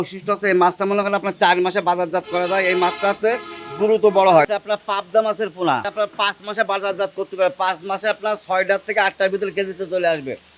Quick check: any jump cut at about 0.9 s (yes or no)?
no